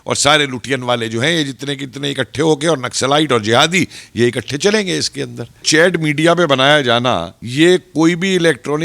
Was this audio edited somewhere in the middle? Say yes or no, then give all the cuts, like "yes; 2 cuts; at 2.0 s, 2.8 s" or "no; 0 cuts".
yes; 2 cuts; at 5.6 s, 7.4 s